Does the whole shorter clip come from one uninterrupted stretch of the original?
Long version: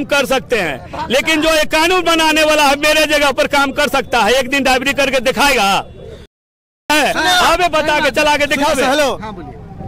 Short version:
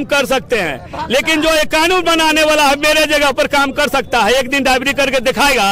yes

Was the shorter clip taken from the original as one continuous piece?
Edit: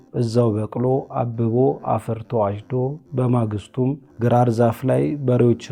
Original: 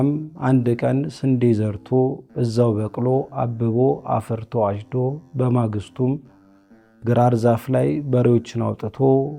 no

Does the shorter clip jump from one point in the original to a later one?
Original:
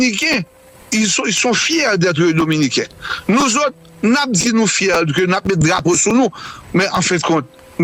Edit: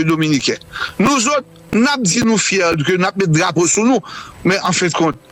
no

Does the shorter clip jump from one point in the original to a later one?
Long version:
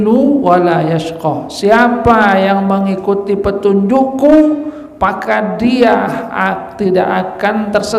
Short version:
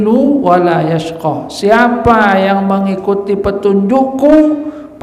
no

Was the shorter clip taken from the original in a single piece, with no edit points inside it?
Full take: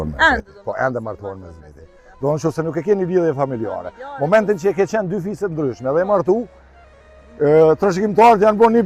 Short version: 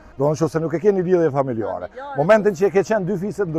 yes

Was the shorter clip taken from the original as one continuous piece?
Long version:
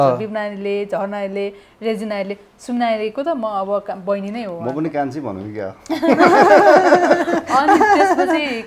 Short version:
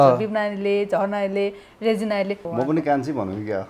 no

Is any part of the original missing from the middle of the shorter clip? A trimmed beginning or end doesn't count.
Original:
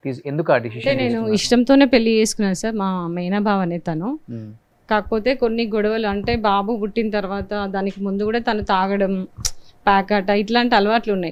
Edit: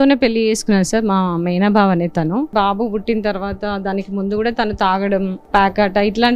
yes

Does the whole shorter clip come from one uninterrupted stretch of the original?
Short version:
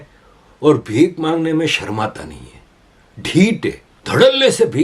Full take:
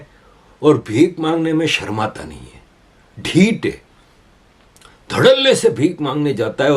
no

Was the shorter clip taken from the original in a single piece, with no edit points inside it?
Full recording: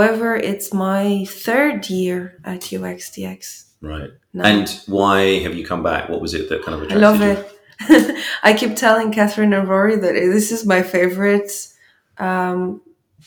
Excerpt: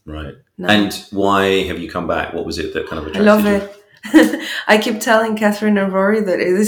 yes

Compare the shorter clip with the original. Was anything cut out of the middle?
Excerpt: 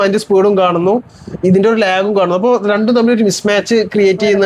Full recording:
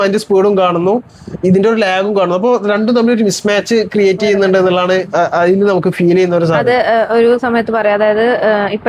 no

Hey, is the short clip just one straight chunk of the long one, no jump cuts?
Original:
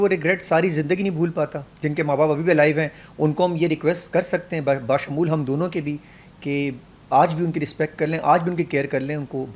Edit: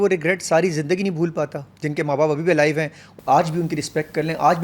no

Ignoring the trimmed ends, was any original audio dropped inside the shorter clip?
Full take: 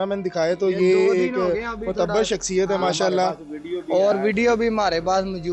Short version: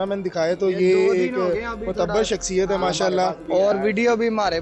yes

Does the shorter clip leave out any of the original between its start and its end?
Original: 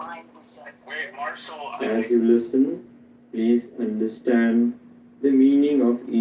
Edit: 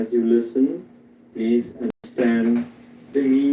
yes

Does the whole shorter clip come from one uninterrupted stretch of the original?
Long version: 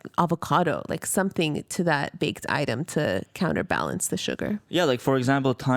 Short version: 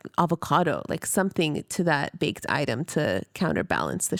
yes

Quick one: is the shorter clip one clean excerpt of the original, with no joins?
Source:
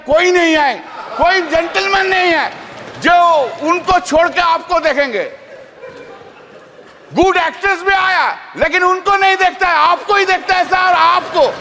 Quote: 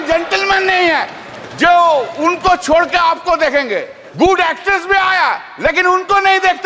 no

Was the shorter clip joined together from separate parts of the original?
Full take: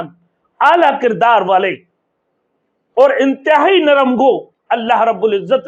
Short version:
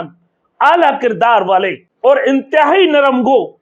yes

